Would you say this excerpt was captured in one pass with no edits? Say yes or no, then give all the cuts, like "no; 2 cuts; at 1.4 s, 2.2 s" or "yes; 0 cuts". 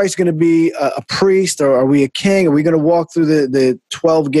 yes; 0 cuts